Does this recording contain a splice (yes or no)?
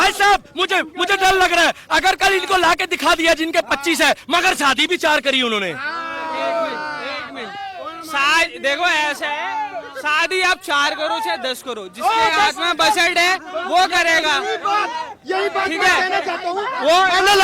no